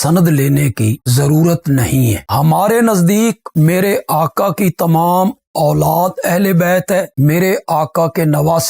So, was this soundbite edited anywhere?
yes; 1 cut; at 2.2 s

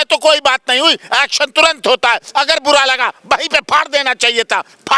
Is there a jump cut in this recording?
no; 0 cuts

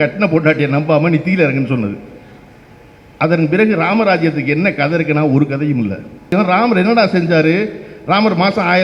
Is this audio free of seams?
no; 1 cut; at 6.3 s

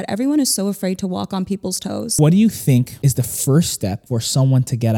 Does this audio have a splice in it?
yes; 3 cuts; at 2.1 s, 2.9 s, 4.0 s

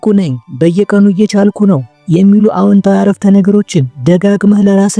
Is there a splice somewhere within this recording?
no; 0 cuts

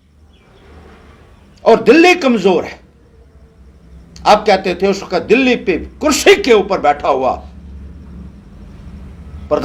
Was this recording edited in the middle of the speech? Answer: no; 0 cuts

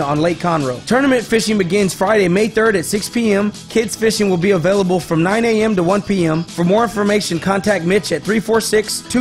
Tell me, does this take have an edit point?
no; 0 cuts

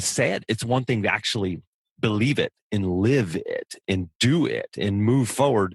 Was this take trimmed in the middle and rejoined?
no; 0 cuts

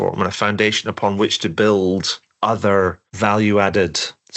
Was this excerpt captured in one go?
yes; 0 cuts

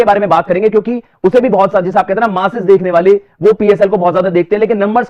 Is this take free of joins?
yes; 0 cuts

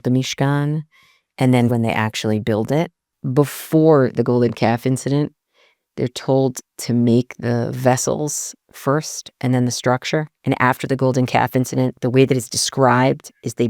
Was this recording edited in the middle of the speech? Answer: yes; 3 cuts; at 1.7 s, 3.2 s, 10.3 s

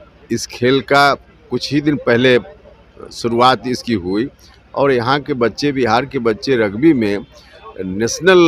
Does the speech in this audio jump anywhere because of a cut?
no; 0 cuts

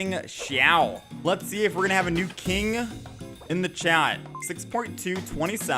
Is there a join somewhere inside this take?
yes; 1 cut; at 1.0 s

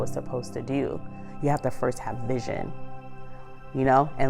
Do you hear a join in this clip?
yes; 1 cut; at 1.2 s

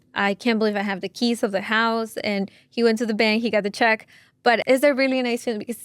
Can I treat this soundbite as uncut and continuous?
no; 1 cut; at 4.6 s

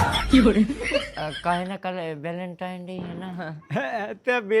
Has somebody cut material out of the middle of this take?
yes; 1 cut; at 1.5 s

